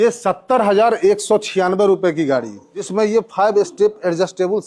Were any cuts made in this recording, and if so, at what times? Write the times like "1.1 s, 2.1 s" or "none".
2.9 s